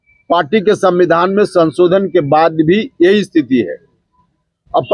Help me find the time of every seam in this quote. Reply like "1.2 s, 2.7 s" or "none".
none